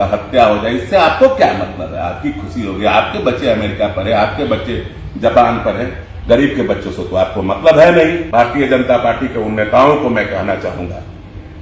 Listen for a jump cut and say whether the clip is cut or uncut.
cut